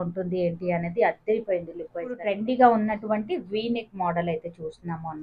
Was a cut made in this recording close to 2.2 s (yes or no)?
yes